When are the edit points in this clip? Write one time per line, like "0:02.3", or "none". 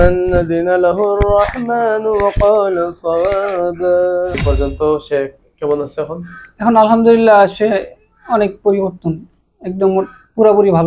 0:04.4